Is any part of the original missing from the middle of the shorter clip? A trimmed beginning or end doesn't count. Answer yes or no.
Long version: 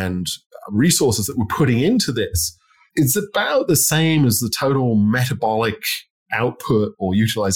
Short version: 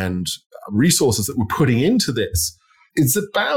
no